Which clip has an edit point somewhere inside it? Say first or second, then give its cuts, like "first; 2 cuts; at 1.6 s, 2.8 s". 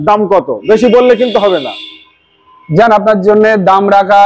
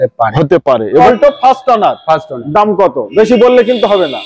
second; 1 cut; at 1.0 s